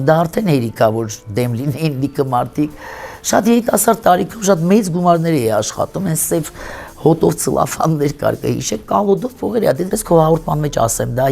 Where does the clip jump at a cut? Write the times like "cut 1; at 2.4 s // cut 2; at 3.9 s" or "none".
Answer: cut 1; at 10.0 s